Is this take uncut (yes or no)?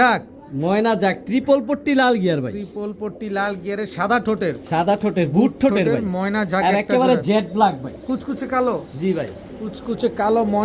yes